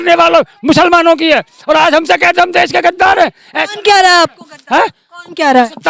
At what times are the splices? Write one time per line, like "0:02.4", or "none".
none